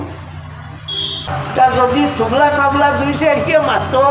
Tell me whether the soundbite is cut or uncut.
cut